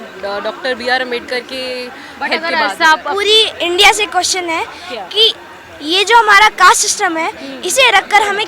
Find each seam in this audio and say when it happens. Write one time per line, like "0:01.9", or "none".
0:03.0